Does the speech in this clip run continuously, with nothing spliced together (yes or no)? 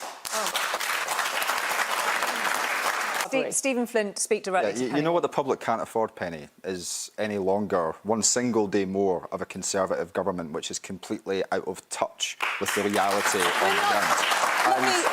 no